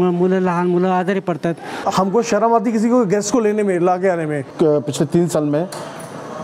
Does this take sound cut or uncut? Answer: cut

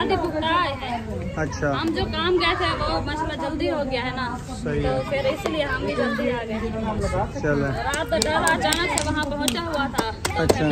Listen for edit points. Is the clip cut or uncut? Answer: uncut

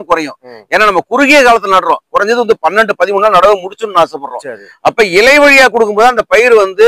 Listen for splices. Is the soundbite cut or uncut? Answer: uncut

